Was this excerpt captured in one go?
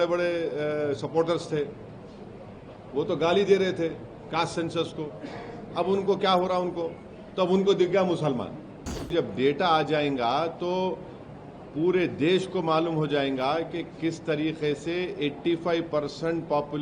no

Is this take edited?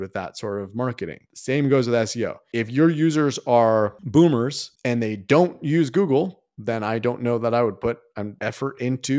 yes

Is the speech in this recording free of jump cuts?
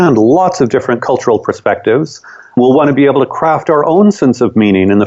no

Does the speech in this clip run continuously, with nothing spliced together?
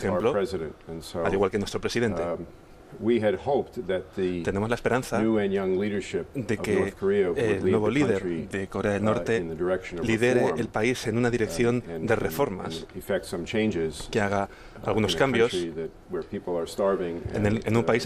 no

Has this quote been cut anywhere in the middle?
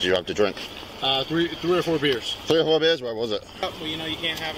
yes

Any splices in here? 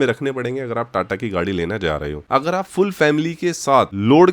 yes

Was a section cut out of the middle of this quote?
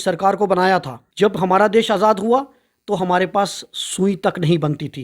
yes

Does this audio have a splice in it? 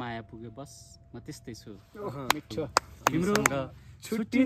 yes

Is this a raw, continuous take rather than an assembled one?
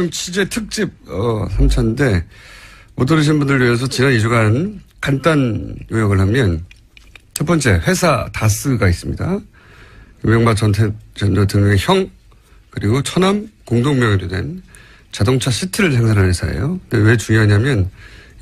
yes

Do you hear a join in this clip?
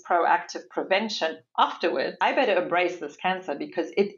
yes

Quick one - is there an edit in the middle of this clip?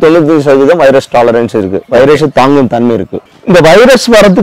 yes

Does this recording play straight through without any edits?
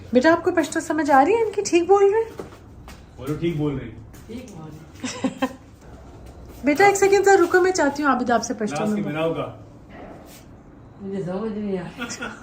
no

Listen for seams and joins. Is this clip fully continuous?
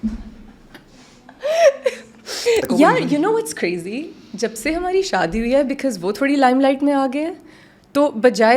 no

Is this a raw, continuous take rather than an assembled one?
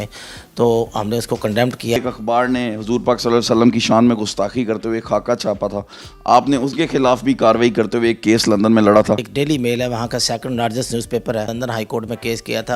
no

